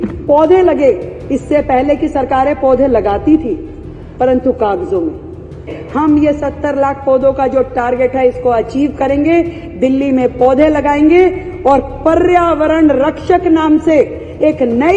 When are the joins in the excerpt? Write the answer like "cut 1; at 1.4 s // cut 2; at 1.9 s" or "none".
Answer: cut 1; at 5.8 s